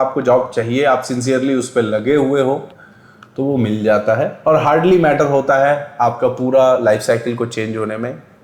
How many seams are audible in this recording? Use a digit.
1